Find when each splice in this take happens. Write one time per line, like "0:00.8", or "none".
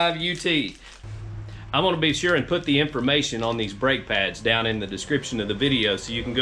0:01.2